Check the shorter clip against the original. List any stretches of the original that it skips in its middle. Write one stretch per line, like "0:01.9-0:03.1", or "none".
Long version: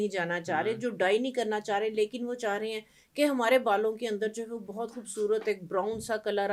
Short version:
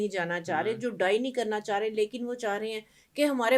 none